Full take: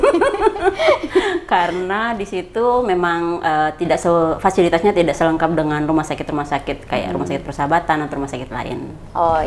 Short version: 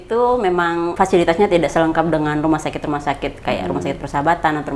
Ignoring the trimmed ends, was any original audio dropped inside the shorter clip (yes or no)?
yes